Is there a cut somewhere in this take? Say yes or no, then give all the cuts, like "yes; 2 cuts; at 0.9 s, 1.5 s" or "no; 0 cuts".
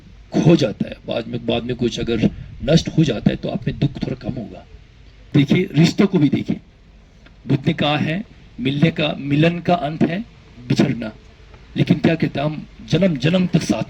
yes; 1 cut; at 5.3 s